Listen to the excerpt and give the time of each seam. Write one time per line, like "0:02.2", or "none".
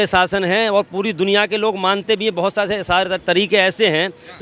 none